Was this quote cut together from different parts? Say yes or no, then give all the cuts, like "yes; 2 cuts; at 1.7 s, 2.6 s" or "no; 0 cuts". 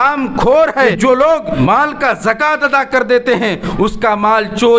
yes; 1 cut; at 1.2 s